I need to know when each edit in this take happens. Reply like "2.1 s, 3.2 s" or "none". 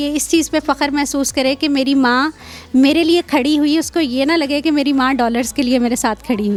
none